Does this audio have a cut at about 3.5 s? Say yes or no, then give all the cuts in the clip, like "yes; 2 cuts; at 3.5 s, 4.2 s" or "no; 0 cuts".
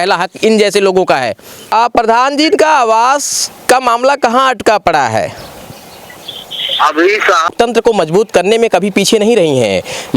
no; 2 cuts; at 1.7 s, 7.5 s